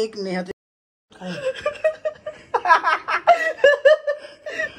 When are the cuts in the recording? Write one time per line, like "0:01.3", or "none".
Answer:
none